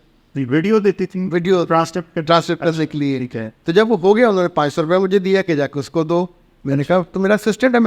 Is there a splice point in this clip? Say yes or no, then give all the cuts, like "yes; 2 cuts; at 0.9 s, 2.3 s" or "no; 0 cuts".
no; 0 cuts